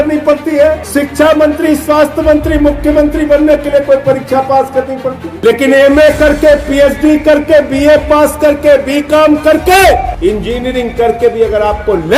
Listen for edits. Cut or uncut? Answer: cut